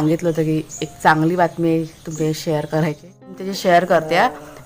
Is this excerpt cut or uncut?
cut